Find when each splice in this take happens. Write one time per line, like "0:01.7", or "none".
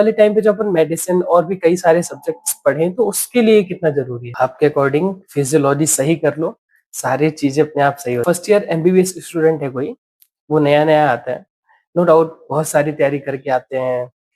0:04.2
0:08.2